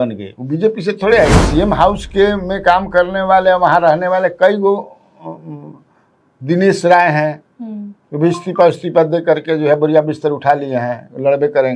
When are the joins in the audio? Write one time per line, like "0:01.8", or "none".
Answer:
0:01.4